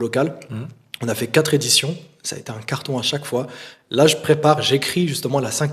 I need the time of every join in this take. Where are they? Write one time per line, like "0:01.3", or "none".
none